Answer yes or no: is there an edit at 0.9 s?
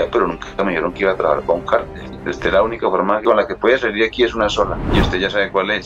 no